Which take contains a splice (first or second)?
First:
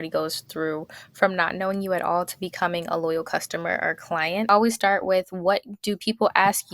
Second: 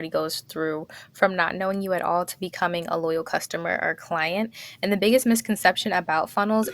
first